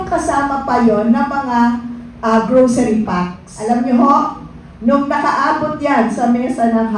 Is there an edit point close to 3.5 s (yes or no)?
yes